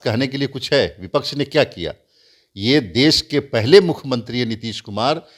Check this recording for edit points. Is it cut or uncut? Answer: uncut